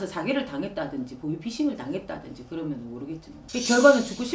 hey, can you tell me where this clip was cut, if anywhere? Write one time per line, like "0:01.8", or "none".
0:03.3